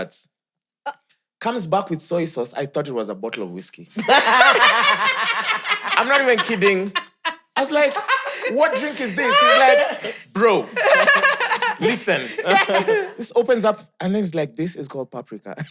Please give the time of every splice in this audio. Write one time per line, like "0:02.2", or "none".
none